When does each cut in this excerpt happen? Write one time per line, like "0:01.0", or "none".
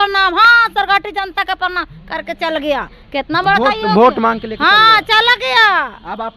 none

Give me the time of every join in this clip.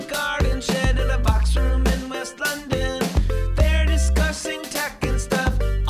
none

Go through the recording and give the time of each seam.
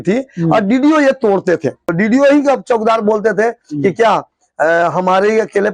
0:01.9

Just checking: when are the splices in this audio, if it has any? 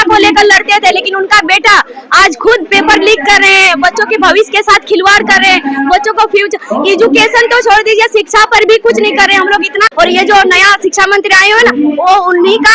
0:09.9

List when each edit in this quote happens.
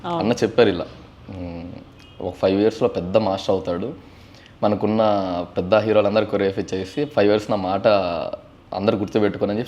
none

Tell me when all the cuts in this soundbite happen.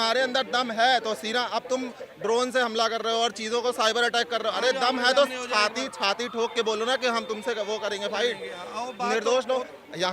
none

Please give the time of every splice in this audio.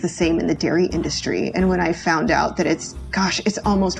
none

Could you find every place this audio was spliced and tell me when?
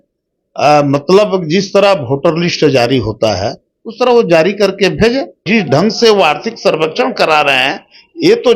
0:05.4

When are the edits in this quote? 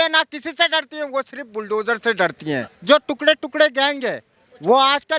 0:02.7

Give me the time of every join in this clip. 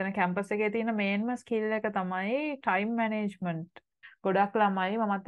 0:04.0

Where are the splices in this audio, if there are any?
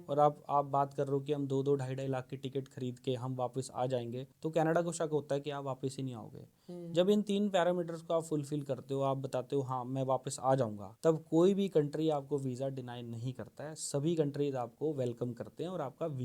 0:04.2
0:10.8

